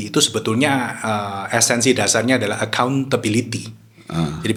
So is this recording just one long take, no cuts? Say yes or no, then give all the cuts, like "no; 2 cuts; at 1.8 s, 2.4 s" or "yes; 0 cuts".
yes; 0 cuts